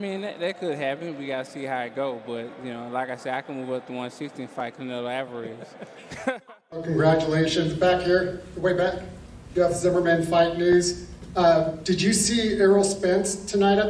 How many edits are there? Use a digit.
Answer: 1